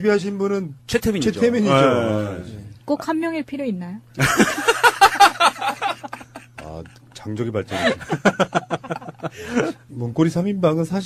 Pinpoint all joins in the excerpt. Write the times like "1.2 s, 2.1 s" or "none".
none